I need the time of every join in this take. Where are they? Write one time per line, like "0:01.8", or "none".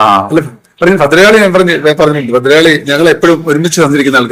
none